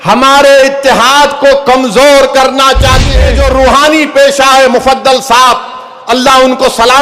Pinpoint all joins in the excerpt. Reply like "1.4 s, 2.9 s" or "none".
3.2 s